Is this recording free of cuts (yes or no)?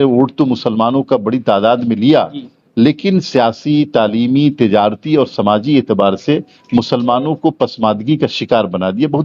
yes